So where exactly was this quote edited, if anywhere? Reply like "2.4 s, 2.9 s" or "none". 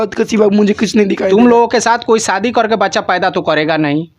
1.2 s